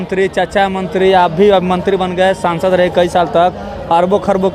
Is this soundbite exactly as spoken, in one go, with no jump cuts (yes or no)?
yes